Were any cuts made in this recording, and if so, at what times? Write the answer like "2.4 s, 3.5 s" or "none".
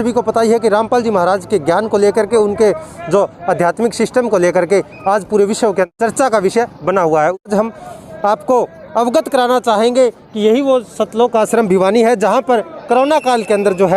0.9 s